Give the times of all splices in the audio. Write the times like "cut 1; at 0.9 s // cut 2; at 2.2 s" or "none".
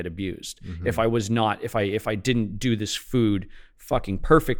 none